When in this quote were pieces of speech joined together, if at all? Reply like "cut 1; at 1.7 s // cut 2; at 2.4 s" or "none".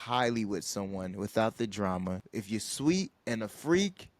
cut 1; at 2.3 s